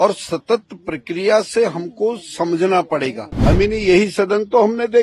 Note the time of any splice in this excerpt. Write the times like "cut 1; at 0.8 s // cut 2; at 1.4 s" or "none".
cut 1; at 3.3 s